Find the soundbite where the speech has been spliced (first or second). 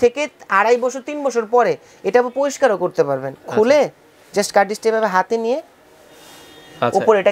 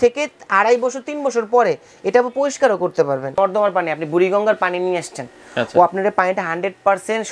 second